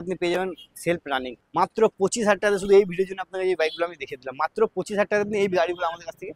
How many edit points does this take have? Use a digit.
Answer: 1